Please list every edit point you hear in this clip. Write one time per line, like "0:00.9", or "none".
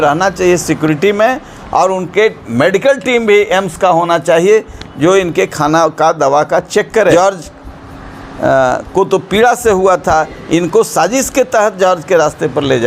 0:07.1